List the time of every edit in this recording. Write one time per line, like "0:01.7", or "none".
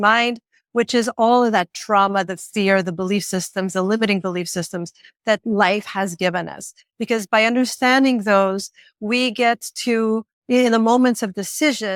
none